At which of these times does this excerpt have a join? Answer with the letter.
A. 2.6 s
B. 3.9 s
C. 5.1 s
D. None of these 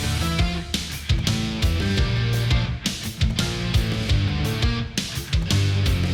D